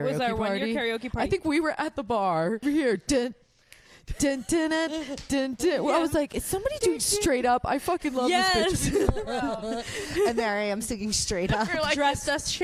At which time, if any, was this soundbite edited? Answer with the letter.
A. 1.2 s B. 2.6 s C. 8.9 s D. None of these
B